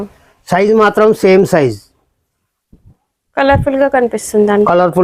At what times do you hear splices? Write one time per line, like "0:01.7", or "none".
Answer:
none